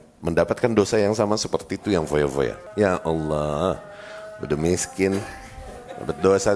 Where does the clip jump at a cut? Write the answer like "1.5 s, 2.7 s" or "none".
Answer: 2.6 s